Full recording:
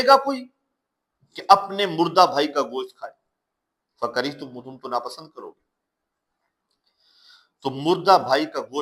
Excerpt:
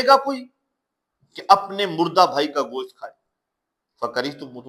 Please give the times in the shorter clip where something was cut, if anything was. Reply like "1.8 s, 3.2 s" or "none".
none